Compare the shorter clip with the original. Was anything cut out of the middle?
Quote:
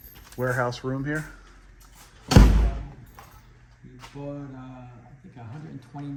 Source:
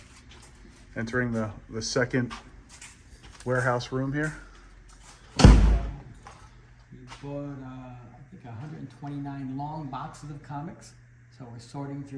no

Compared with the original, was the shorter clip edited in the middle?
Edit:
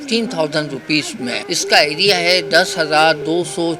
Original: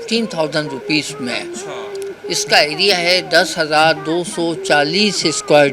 yes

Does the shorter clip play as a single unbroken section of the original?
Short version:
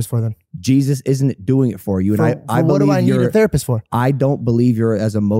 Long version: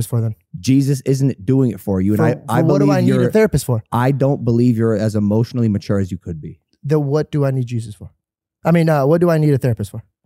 yes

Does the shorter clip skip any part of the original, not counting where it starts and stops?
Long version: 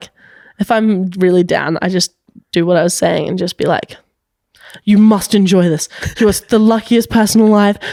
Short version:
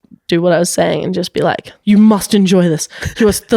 yes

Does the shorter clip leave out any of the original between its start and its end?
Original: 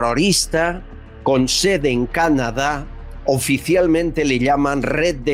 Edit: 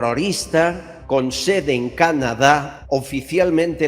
yes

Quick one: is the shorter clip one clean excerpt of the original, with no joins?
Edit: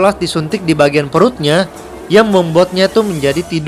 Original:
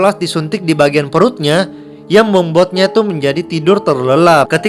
yes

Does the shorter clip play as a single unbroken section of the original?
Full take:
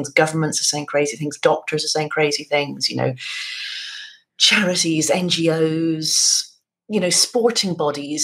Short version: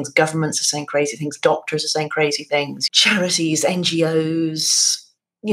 no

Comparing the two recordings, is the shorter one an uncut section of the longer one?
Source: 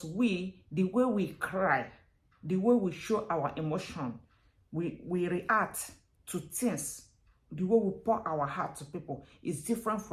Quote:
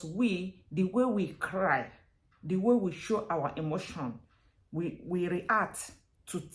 yes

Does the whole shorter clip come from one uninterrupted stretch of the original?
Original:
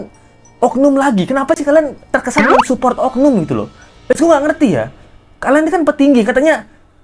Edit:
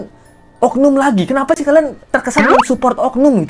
yes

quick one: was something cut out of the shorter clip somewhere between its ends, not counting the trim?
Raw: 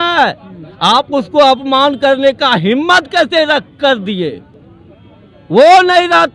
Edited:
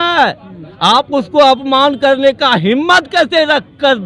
no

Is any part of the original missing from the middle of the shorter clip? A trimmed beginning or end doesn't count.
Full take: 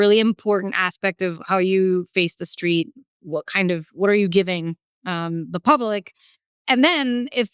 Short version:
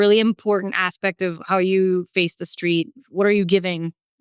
yes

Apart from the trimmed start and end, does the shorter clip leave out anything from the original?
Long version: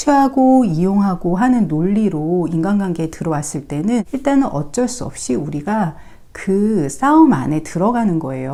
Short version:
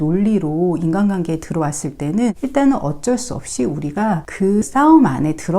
yes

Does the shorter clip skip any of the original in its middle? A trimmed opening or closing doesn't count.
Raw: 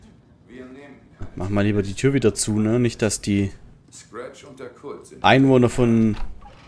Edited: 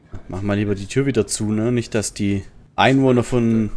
yes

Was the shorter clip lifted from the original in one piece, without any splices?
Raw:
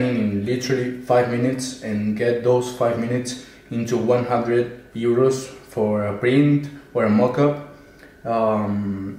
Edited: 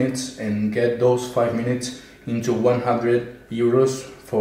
yes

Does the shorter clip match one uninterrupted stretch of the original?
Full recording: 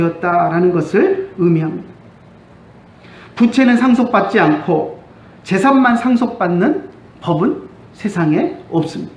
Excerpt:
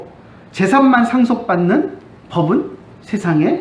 yes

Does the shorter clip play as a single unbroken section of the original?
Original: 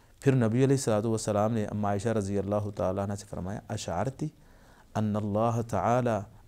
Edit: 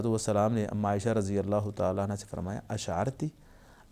yes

